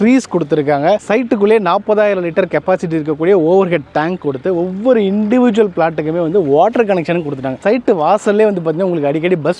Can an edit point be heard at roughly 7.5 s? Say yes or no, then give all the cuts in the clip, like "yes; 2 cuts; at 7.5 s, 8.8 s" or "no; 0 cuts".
yes; 1 cut; at 7.5 s